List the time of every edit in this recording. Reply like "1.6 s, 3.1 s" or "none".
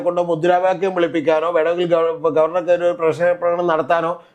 none

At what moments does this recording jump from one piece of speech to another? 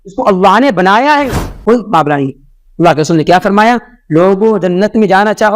1.4 s

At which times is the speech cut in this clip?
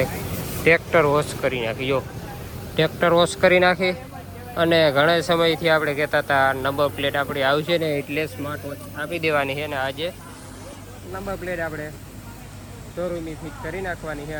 none

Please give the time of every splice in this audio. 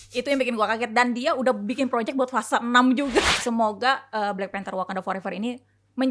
3.3 s

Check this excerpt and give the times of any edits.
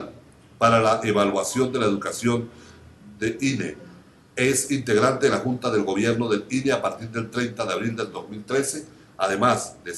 1.0 s

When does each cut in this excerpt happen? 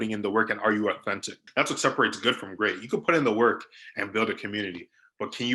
1.4 s

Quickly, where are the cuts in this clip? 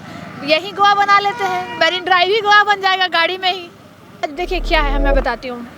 4.2 s

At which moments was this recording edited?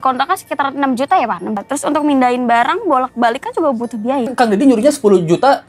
1.6 s, 4.3 s

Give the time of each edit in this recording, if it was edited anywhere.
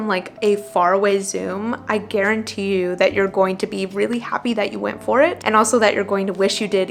none

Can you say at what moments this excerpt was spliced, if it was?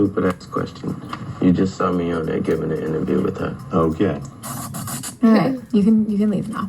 4.9 s

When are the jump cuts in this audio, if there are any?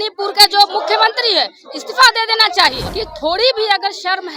2.9 s

